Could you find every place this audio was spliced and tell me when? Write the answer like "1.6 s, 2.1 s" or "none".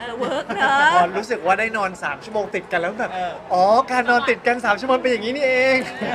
none